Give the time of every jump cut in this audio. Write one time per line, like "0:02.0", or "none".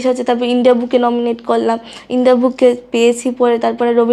none